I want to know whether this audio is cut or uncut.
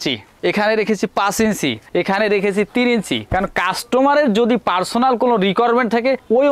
uncut